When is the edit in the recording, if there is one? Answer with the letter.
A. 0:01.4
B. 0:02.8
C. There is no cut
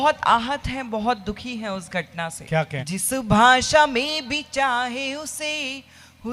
B